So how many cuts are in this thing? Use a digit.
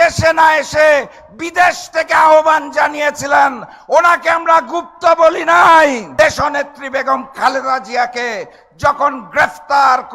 1